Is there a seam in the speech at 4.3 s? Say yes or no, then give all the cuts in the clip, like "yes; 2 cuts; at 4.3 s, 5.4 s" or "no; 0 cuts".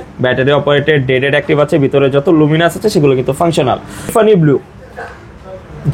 yes; 1 cut; at 4.3 s